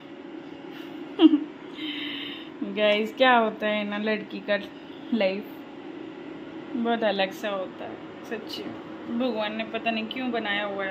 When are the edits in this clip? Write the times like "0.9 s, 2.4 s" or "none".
none